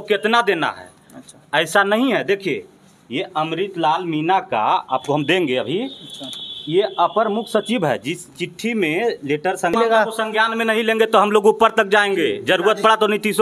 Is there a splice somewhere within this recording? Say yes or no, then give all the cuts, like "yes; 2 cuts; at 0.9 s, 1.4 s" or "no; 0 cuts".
yes; 1 cut; at 9.7 s